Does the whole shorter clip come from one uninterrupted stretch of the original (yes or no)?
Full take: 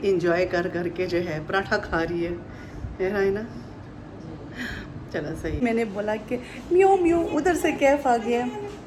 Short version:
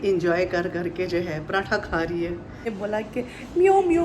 no